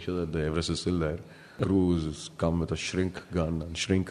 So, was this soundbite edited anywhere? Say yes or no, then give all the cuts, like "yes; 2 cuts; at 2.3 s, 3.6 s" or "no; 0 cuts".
yes; 1 cut; at 1.5 s